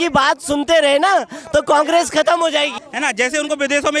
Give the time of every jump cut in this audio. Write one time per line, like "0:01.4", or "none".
0:02.8